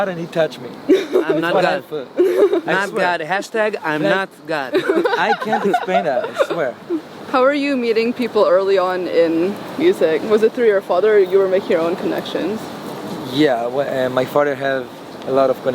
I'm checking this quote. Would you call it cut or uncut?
uncut